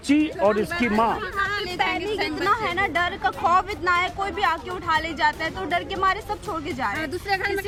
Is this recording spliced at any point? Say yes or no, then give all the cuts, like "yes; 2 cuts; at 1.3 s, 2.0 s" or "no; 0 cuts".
no; 0 cuts